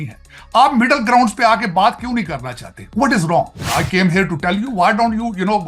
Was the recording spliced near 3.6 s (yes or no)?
yes